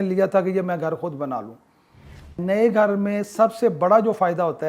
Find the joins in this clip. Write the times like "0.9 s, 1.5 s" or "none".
2.2 s